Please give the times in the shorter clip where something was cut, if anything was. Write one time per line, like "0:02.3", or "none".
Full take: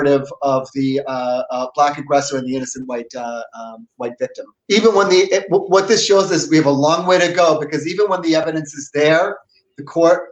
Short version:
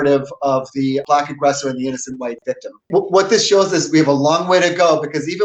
0:01.0
0:02.9

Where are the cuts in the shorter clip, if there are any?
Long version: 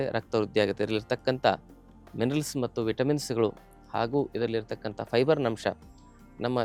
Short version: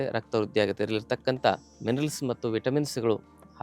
0:01.7

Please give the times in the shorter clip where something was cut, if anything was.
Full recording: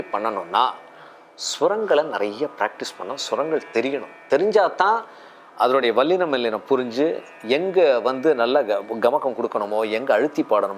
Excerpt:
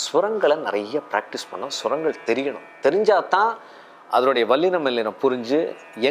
none

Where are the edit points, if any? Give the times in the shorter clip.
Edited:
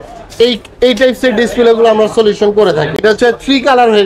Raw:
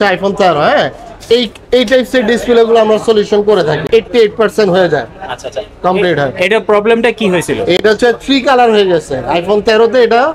0:03.0

